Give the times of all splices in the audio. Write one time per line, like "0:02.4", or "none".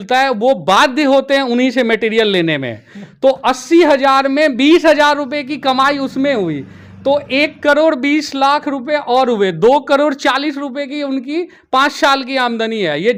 none

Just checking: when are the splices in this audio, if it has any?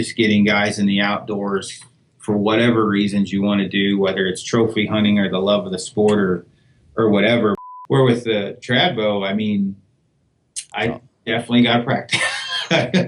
0:07.6

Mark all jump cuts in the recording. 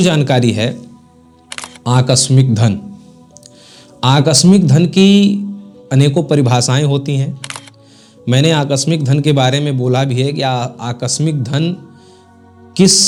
none

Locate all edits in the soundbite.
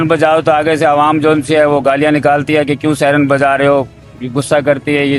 none

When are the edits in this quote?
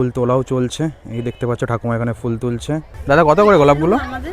0:02.9

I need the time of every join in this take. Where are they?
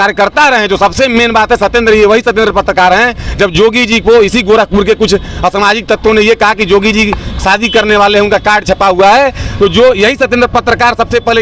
none

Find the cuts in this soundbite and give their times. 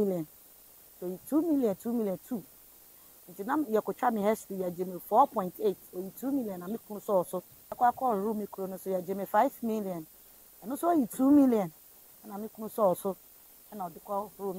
0:07.6

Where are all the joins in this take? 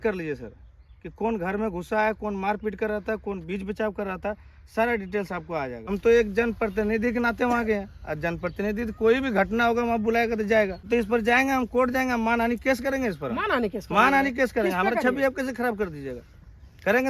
0:05.9
0:10.9

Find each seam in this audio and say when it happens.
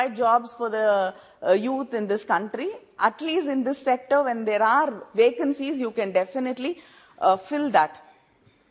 none

